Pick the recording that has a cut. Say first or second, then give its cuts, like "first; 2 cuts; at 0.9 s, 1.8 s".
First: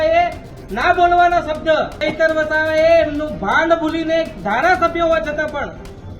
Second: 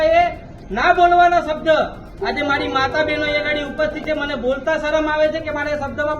first; 1 cut; at 2.0 s